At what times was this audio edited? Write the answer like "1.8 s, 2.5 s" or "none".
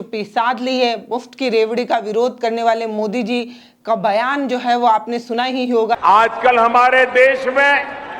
6.0 s